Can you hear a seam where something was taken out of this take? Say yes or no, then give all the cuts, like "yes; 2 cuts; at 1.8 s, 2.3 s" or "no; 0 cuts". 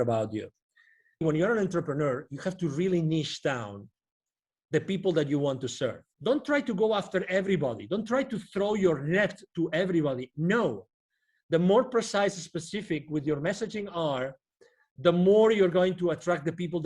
yes; 2 cuts; at 1.2 s, 6.1 s